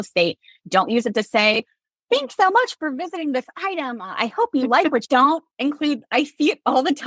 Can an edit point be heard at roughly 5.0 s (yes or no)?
no